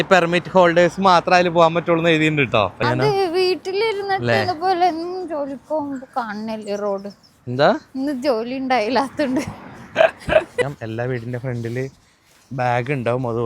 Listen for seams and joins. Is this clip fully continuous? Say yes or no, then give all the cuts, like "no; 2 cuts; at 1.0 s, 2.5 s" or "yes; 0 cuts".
no; 2 cuts; at 2.8 s, 10.6 s